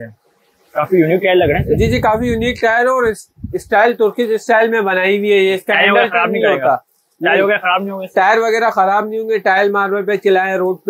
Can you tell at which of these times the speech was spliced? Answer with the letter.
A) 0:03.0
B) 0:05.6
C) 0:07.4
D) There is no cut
D